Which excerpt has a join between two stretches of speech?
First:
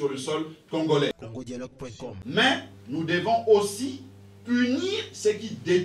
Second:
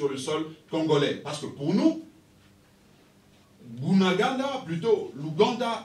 first; 1 cut; at 1.7 s

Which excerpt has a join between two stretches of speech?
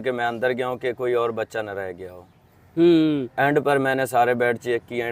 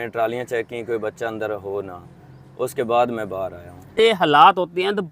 second; 1 cut; at 3.9 s

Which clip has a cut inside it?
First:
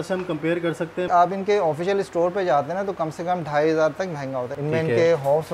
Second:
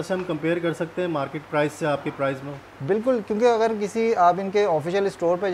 first; 2 cuts; at 1.1 s, 4.5 s

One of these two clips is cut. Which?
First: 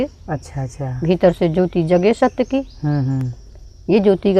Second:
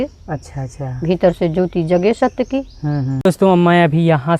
second; 1 cut; at 3.1 s

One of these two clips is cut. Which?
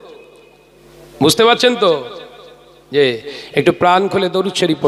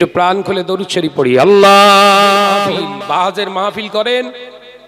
second; 1 cut; at 2.7 s

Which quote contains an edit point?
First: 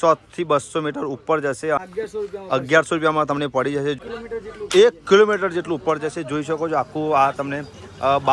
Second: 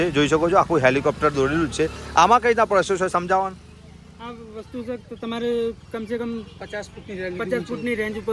first; 2 cuts; at 1.8 s, 4.0 s

